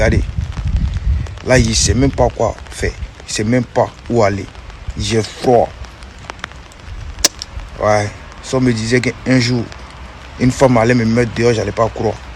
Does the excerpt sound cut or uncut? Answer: uncut